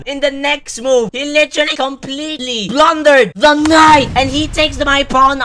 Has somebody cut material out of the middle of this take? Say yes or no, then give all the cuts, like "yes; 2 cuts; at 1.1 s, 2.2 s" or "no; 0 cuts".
no; 0 cuts